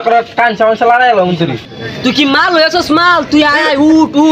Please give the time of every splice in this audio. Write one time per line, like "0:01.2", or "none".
none